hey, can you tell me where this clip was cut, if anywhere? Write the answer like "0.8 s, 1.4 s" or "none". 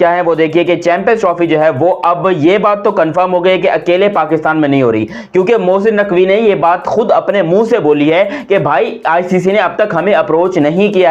none